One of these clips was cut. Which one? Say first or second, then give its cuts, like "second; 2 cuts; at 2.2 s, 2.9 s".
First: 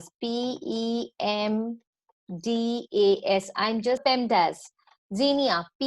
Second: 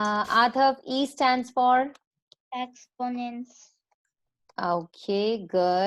first; 1 cut; at 4.0 s